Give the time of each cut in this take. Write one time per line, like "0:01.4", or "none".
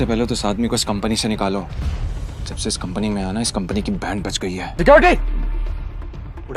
0:04.6